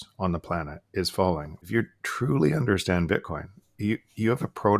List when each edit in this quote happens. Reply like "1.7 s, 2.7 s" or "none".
1.7 s